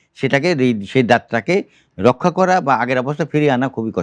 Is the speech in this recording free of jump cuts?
yes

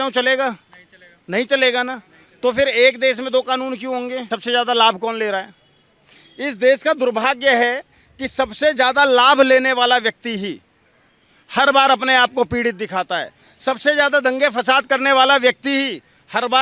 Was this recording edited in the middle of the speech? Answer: yes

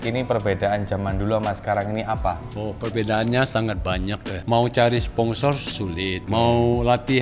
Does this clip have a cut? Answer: yes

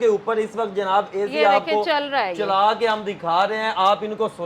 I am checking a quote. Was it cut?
no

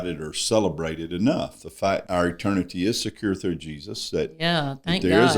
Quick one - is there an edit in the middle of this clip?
yes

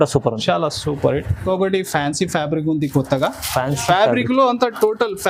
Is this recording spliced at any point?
yes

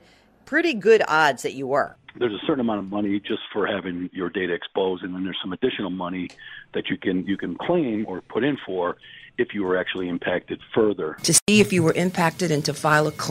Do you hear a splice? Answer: yes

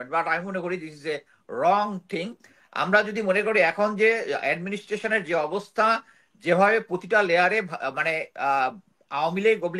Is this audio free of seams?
yes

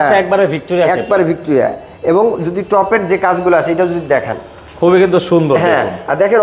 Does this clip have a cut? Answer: no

